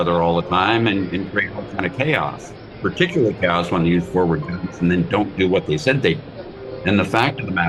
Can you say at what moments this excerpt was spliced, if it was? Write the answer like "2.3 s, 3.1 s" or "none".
none